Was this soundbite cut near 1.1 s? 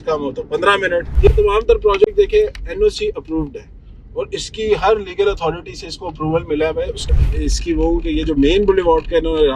yes; 2 cuts; at 1.1 s, 7.2 s

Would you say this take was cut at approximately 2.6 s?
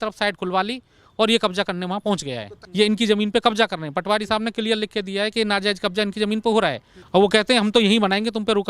yes; 2 cuts; at 2.6 s, 6.9 s

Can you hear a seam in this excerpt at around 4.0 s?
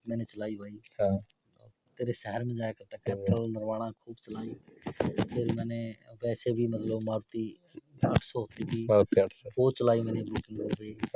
no; 0 cuts

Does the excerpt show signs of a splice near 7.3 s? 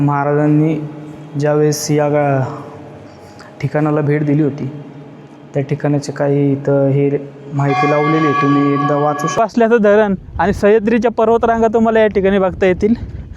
no; 1 cut; at 9.4 s

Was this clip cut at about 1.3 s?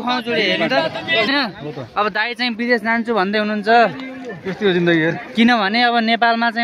yes; 1 cut; at 1.3 s

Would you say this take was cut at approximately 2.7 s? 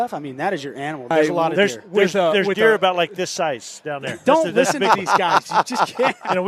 no; 1 cut; at 1.1 s

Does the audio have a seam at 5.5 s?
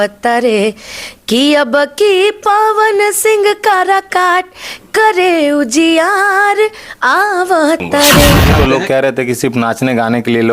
no; 1 cut; at 8.4 s

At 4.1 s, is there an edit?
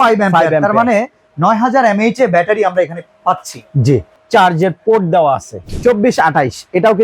yes; 2 cuts; at 4.1 s, 5.6 s

